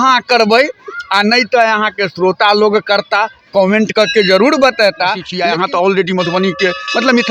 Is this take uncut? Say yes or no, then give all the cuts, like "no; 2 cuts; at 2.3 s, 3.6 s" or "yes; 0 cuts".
no; 1 cut; at 5.3 s